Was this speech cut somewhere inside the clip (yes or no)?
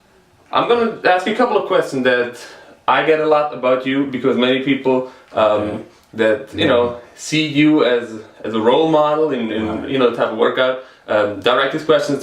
yes